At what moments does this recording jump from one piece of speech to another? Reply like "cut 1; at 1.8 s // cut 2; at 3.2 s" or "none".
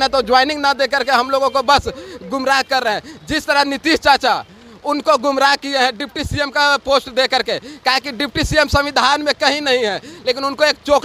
none